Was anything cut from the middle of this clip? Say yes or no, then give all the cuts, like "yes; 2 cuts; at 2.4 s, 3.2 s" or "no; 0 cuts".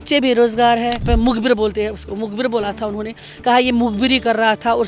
yes; 1 cut; at 1.1 s